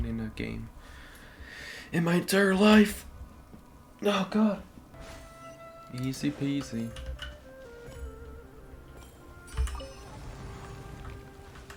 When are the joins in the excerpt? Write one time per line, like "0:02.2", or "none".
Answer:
none